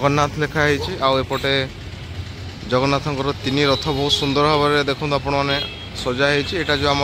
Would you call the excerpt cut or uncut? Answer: uncut